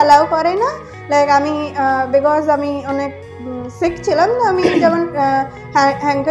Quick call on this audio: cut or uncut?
uncut